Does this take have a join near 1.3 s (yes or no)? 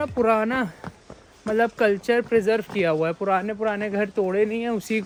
no